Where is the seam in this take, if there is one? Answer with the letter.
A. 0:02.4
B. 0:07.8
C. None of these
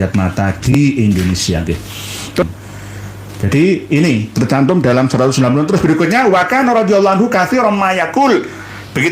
A